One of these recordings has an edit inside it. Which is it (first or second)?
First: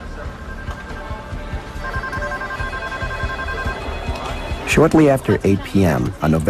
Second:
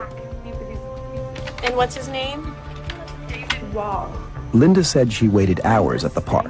first